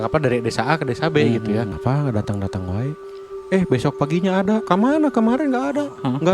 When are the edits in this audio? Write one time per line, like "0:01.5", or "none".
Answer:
0:01.7
0:04.6